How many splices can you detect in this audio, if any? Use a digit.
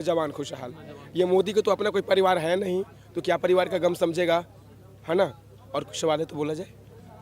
0